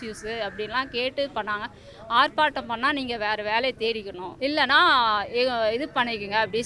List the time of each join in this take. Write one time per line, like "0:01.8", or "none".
0:04.2